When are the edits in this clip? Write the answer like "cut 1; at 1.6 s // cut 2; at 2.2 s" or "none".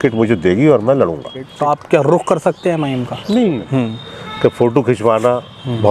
cut 1; at 1.4 s // cut 2; at 3.6 s

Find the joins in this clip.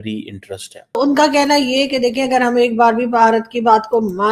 cut 1; at 1.0 s

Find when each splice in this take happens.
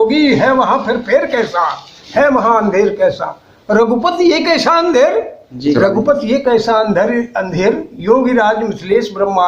cut 1; at 5.8 s

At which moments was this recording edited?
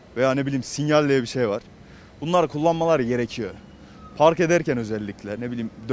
none

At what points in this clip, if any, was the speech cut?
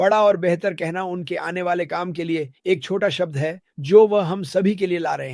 none

